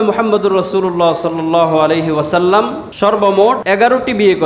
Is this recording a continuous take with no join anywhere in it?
no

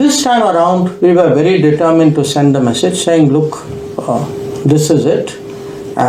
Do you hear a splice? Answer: no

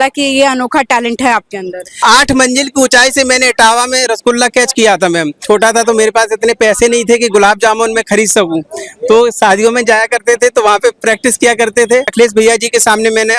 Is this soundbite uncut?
no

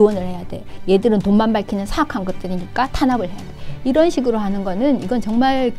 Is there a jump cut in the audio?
no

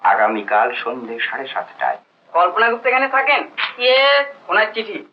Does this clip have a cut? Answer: no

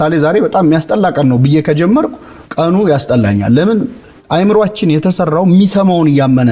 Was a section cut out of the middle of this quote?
no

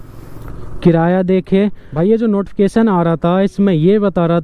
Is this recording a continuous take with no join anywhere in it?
no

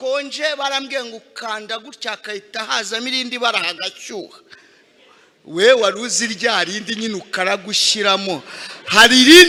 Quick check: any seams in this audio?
no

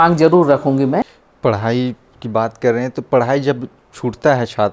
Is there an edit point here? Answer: yes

